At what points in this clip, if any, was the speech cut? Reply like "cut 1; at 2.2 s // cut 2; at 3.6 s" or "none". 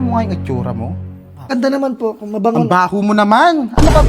cut 1; at 1.5 s